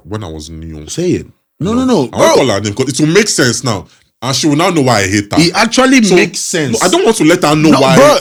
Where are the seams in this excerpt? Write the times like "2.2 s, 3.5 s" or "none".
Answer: none